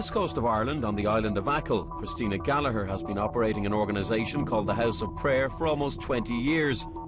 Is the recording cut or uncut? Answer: uncut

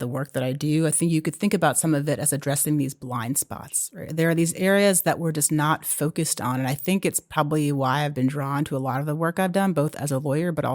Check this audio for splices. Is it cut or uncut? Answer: uncut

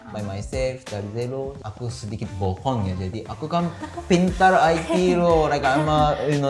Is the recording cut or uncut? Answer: cut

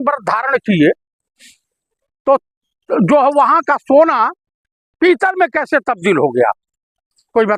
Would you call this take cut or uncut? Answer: uncut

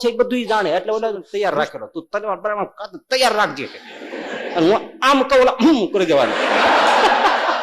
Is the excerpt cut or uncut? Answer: cut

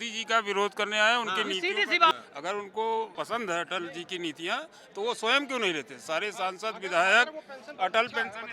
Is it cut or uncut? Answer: cut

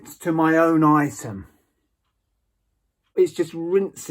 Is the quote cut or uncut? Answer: cut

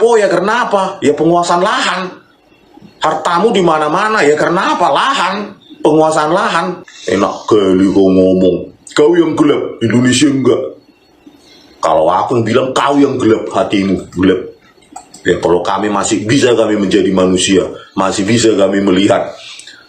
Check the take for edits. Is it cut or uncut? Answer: uncut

